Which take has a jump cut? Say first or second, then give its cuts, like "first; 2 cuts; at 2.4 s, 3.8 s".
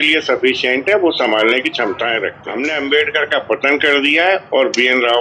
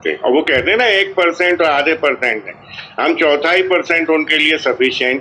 first; 1 cut; at 2.4 s